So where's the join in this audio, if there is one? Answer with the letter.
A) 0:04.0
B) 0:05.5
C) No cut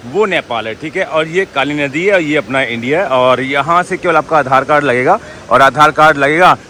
C